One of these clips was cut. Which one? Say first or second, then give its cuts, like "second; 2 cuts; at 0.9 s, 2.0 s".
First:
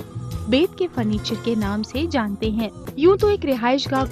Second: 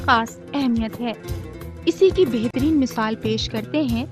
first; 1 cut; at 2.8 s